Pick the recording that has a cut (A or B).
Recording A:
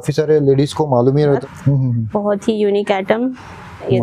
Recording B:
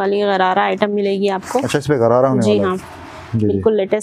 A